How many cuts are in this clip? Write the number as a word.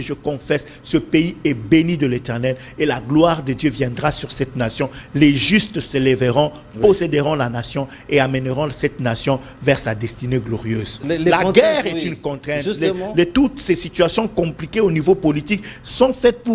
one